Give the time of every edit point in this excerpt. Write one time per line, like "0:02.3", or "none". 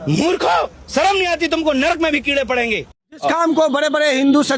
0:03.1